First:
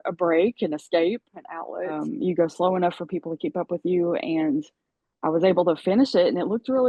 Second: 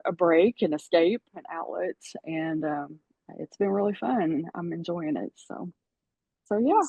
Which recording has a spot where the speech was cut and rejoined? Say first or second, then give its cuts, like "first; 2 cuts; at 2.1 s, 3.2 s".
first; 1 cut; at 2.0 s